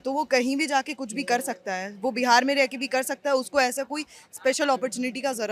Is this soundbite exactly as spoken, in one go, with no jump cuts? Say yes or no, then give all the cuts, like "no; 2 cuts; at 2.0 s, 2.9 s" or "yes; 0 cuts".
yes; 0 cuts